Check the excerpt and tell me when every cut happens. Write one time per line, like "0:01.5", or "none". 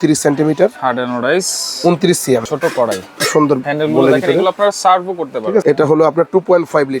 0:02.4
0:05.6

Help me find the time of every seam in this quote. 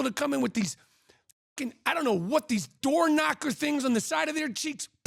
none

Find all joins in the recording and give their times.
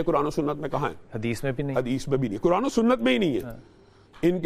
none

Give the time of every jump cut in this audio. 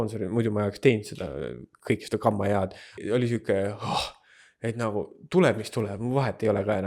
0:03.0

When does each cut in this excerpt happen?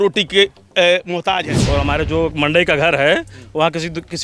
0:01.5

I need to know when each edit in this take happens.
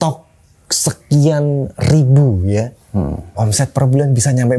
0:03.3

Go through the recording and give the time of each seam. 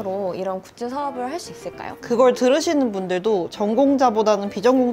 0:02.0

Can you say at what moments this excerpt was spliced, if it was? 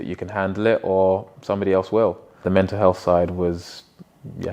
0:02.4

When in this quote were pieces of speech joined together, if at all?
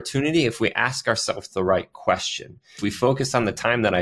0:02.8

